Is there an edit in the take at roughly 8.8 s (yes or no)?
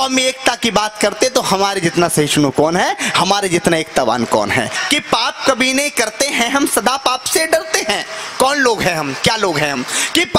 no